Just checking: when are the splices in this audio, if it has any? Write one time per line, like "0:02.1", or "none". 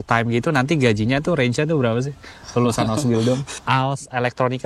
0:03.5